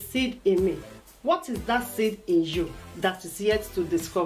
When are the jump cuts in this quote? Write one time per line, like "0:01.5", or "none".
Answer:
0:03.3